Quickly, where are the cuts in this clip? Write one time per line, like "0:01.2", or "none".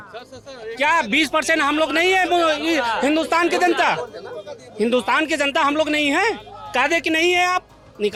none